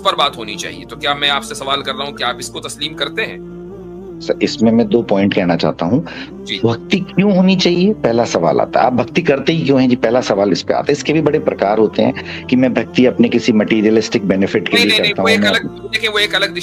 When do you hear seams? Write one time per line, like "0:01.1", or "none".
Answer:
none